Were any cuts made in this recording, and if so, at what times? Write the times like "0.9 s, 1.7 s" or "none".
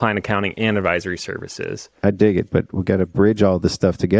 1.9 s